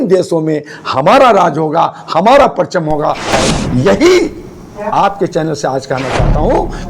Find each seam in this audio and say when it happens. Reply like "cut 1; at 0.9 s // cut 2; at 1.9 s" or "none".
cut 1; at 3.3 s